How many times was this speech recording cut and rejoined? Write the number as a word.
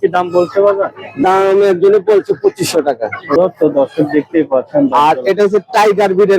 one